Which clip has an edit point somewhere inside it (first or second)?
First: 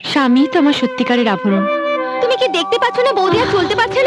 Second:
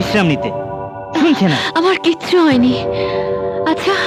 first